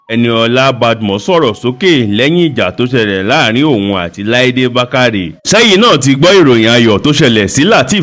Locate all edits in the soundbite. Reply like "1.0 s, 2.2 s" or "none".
5.3 s